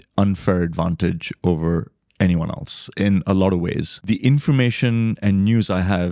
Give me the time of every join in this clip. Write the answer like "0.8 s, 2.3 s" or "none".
3.9 s